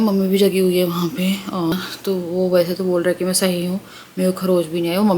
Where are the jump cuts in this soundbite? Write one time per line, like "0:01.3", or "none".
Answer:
0:01.7

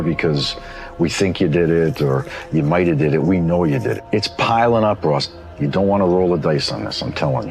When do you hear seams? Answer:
0:04.0

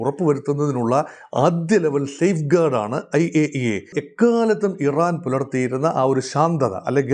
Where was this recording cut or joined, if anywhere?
0:04.0

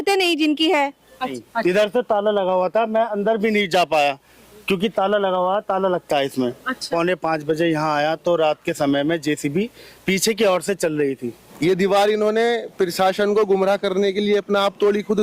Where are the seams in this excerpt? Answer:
0:01.3
0:06.8
0:11.5

